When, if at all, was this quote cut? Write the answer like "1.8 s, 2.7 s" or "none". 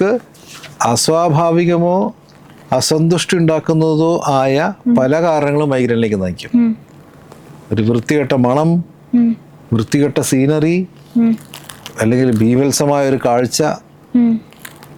none